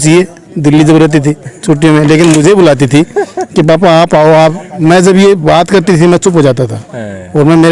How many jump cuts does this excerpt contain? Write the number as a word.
zero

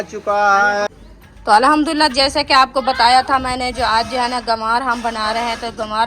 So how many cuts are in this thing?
one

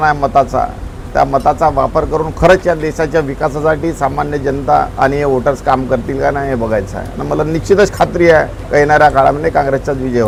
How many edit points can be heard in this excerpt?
zero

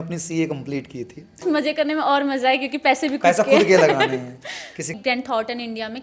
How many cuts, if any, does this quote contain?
two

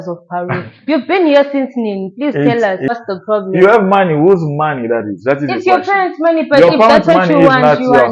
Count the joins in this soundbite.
one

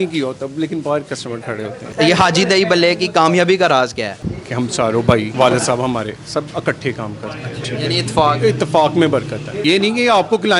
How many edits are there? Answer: five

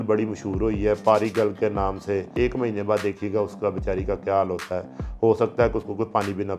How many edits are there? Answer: one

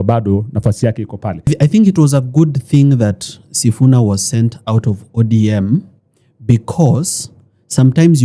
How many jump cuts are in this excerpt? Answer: one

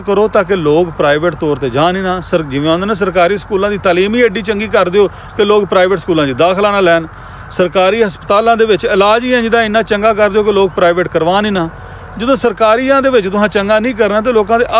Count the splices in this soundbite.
zero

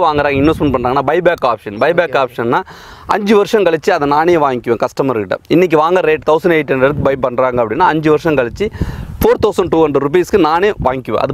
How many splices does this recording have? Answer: zero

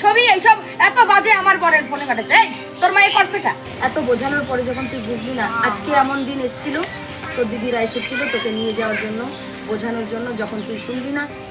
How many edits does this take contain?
one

